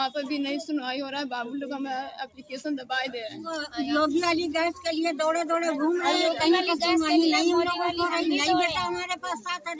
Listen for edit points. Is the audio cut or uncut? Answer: cut